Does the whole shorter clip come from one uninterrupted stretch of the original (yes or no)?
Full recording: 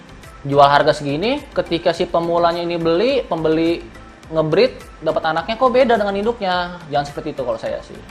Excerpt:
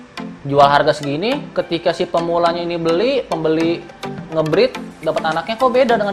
yes